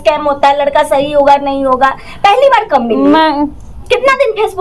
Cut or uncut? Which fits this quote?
uncut